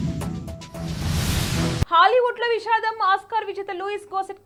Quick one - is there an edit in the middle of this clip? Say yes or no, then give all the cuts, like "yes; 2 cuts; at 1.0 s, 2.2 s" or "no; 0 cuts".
no; 0 cuts